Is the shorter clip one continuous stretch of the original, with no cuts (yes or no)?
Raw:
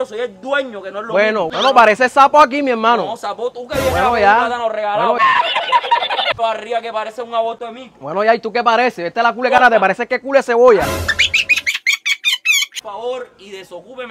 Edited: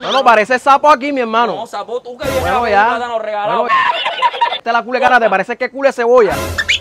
no